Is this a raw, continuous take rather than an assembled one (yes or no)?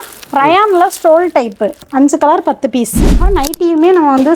no